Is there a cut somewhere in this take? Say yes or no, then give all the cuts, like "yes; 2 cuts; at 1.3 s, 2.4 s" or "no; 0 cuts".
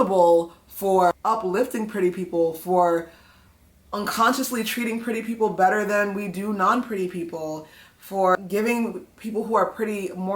yes; 2 cuts; at 1.1 s, 8.4 s